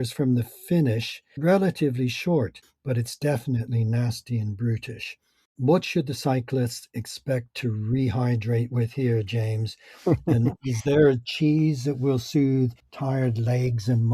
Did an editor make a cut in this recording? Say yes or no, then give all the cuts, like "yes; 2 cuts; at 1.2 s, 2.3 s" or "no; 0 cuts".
yes; 3 cuts; at 1.3 s, 2.7 s, 5.5 s